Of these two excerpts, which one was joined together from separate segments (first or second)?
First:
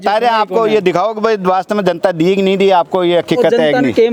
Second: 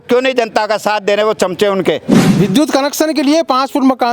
second